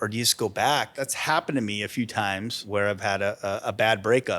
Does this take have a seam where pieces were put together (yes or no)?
yes